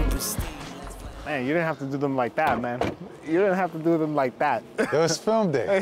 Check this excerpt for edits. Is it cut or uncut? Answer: uncut